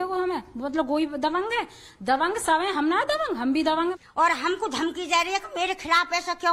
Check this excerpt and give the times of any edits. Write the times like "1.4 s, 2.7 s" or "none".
2.5 s, 3.9 s